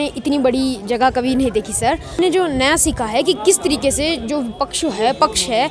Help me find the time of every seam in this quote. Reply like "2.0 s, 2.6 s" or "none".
2.2 s